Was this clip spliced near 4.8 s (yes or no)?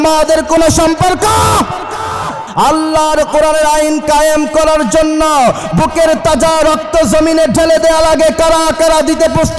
no